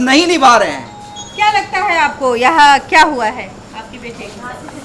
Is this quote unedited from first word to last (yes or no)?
yes